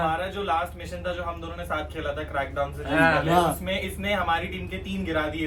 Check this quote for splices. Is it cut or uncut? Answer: uncut